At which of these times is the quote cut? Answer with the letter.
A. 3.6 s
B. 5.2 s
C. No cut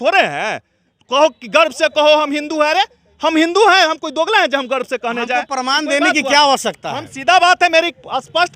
C